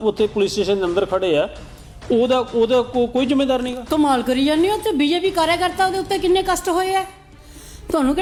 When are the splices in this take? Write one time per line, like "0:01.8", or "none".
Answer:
none